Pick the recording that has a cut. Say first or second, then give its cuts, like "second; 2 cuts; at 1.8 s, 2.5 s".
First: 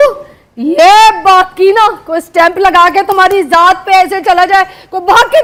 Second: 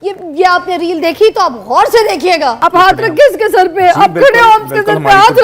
second; 1 cut; at 2.6 s